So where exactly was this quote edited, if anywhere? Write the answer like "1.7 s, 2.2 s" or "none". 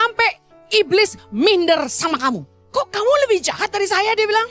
2.5 s